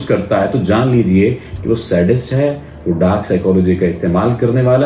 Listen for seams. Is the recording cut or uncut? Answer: uncut